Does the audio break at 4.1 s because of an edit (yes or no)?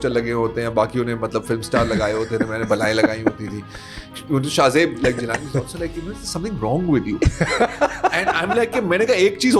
yes